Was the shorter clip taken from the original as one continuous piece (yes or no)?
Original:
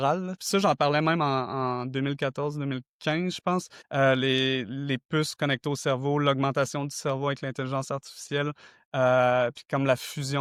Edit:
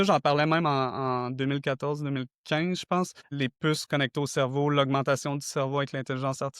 no